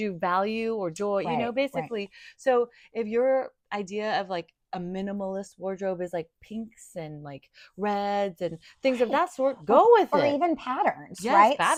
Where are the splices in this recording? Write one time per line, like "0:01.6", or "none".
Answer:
none

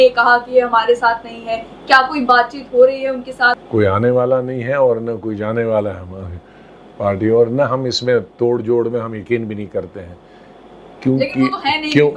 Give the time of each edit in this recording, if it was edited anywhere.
0:03.5

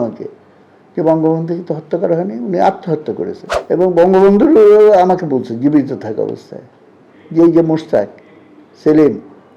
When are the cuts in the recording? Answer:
0:03.5

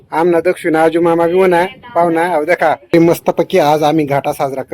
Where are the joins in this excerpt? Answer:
0:02.9

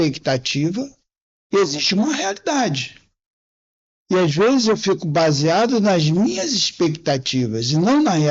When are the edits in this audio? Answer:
none

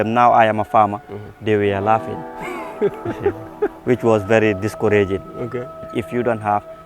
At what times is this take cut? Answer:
0:05.9

